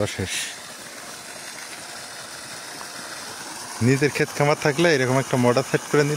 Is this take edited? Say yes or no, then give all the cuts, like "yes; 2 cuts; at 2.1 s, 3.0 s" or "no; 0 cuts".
no; 0 cuts